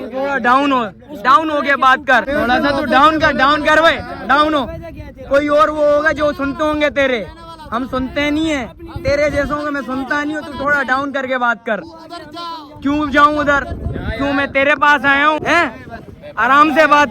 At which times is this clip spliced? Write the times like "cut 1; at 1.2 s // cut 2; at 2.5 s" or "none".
cut 1; at 2.3 s // cut 2; at 15.4 s